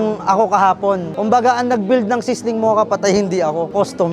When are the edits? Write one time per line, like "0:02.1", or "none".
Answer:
0:01.1

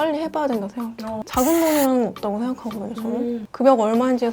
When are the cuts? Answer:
0:01.2

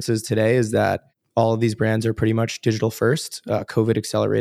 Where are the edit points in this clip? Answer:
0:01.1

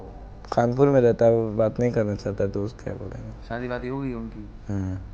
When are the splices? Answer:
none

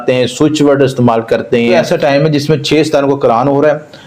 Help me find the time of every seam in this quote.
0:01.7

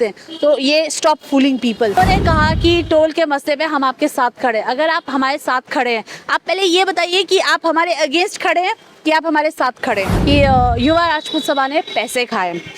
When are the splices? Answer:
0:02.0
0:10.1

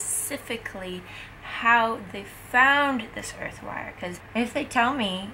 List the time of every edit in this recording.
0:04.2

